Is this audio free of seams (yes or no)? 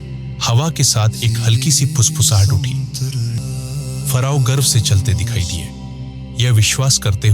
no